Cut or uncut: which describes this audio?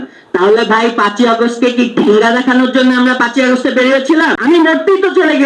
cut